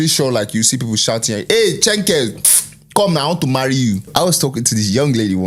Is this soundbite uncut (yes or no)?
no